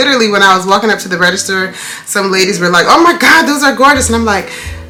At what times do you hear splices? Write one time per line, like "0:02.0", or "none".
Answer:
none